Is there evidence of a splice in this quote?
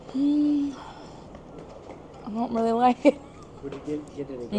no; 0 cuts

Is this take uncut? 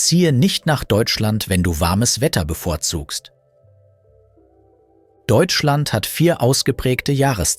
no; 2 cuts; at 3.4 s, 5.3 s

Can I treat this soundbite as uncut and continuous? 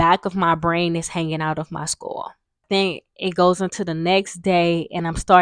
no; 1 cut; at 2.6 s

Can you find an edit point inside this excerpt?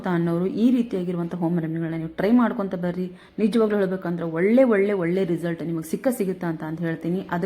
no; 0 cuts

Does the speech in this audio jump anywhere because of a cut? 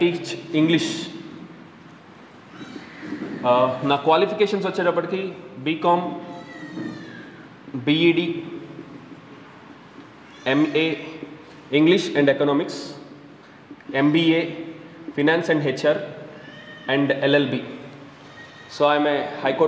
no; 0 cuts

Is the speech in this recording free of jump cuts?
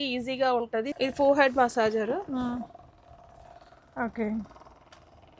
no; 1 cut; at 0.9 s

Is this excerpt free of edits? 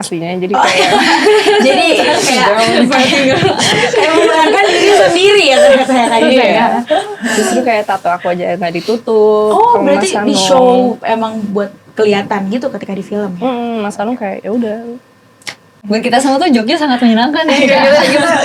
no; 1 cut; at 15.8 s

